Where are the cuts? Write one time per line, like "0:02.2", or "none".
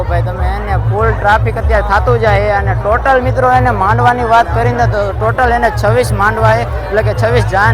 none